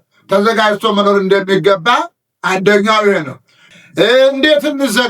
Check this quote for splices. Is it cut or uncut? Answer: cut